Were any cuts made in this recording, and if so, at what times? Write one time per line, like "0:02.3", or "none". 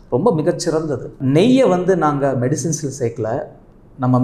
0:01.1